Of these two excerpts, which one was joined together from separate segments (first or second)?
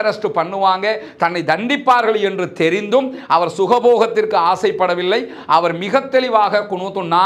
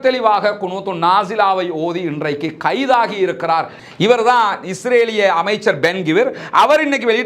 second